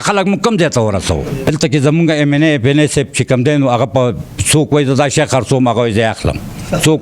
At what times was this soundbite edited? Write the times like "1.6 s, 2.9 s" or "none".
1.5 s

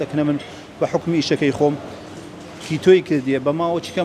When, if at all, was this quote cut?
none

